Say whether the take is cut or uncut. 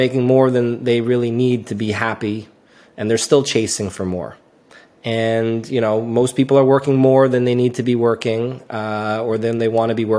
uncut